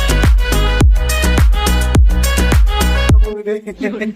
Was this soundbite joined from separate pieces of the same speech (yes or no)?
yes